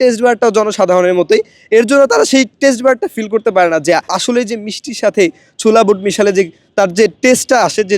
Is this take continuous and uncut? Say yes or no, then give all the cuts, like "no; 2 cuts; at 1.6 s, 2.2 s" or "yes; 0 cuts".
no; 1 cut; at 4.2 s